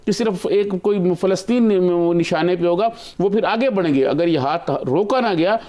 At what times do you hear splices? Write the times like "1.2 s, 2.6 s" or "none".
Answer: none